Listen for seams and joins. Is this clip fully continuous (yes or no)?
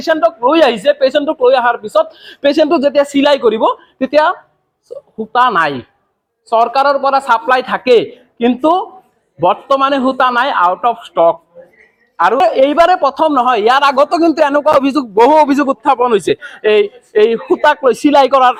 yes